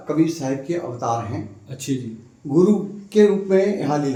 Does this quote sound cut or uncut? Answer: uncut